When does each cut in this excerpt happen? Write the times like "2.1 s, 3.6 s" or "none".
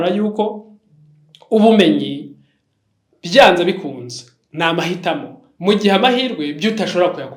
none